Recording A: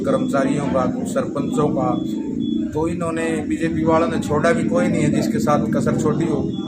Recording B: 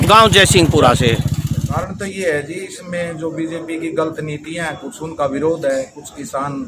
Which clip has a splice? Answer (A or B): B